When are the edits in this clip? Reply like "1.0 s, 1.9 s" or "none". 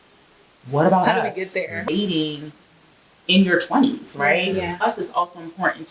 1.8 s, 4.8 s